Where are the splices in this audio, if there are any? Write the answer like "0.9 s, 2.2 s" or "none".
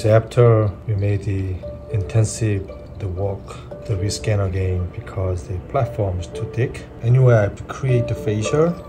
0.8 s, 2.8 s, 3.7 s, 6.9 s